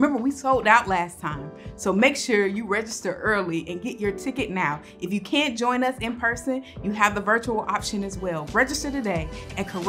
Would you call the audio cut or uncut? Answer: cut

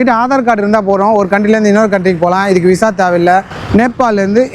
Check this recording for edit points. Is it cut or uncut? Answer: cut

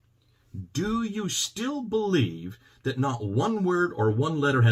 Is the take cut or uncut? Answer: uncut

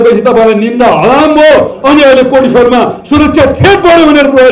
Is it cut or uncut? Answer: uncut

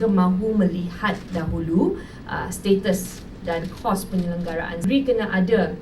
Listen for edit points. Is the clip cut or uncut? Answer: cut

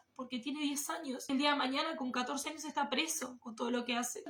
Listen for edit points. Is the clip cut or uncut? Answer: uncut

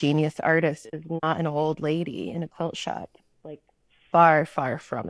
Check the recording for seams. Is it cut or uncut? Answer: uncut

